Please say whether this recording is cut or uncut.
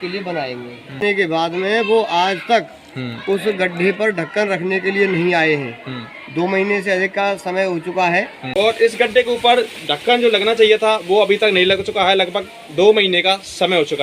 cut